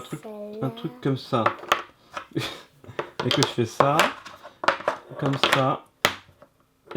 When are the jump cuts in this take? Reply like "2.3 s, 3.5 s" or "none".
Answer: none